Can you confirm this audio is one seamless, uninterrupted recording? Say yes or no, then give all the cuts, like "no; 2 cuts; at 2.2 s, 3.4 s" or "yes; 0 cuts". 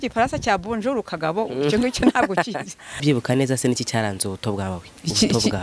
no; 1 cut; at 3.0 s